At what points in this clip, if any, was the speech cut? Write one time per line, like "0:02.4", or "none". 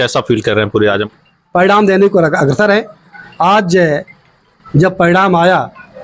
0:01.0